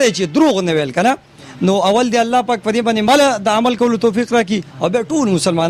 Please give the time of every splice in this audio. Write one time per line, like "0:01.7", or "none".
none